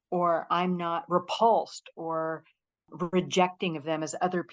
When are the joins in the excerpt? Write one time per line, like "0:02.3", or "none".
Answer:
0:01.0